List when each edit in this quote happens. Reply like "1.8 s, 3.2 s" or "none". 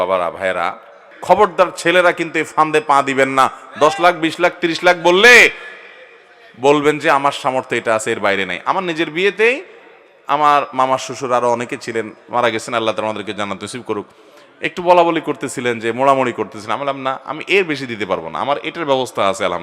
1.1 s

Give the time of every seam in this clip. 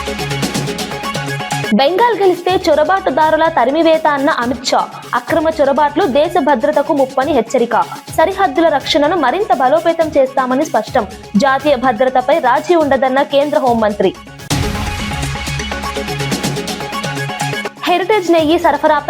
1.7 s

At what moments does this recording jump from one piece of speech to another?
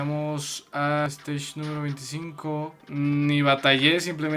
1.1 s, 2.8 s

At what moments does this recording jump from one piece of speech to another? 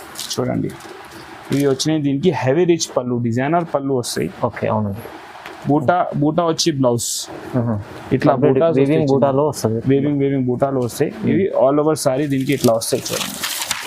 none

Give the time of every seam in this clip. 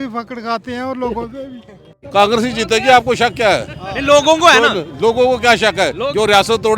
2.0 s

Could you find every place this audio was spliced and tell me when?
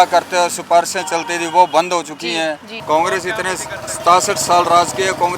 2.7 s

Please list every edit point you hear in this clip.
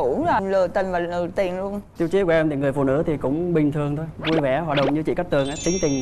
1.8 s

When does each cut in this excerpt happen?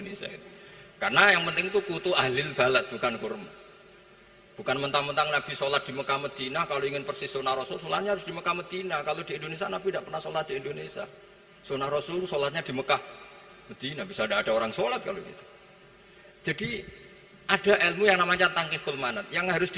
none

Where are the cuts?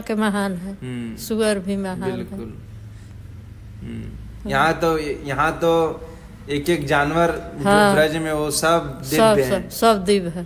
none

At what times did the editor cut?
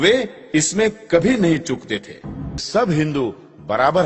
2.6 s

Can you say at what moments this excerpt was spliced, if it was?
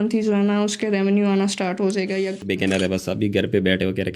2.5 s

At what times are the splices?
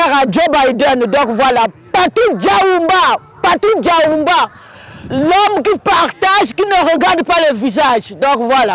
5.0 s

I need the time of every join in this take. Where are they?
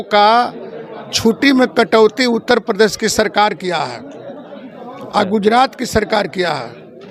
none

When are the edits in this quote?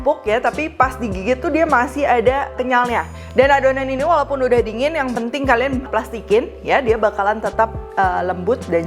2.8 s, 5.9 s

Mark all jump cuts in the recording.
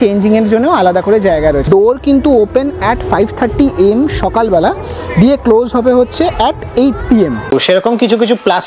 1.6 s, 7.5 s

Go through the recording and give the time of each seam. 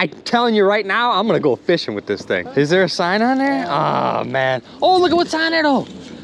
2.4 s

